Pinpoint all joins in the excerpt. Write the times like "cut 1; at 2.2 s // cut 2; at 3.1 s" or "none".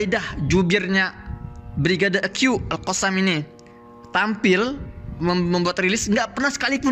none

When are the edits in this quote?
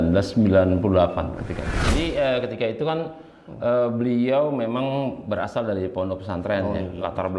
cut 1; at 1.7 s

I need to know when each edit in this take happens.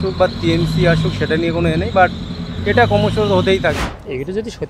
cut 1; at 3.8 s

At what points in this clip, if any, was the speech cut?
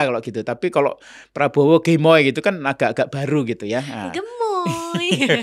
none

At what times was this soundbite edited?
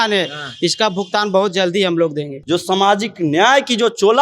cut 1; at 2.4 s

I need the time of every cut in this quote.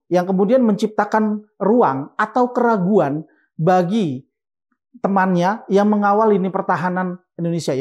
none

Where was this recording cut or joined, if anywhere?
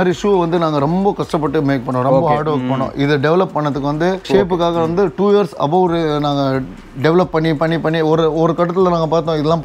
cut 1; at 4.3 s

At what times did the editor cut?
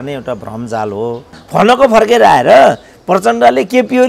cut 1; at 1.3 s

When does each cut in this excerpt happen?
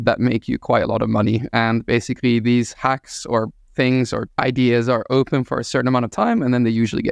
none

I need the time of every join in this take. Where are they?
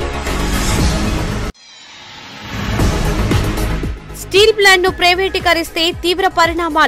cut 1; at 1.6 s // cut 2; at 4.0 s

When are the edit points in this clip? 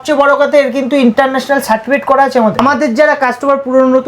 cut 1; at 2.6 s

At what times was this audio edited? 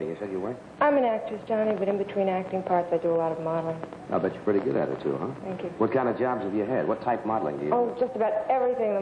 none

